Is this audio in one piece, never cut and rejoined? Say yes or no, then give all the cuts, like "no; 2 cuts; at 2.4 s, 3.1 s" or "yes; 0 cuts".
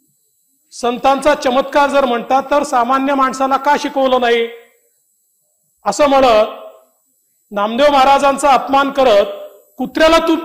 yes; 0 cuts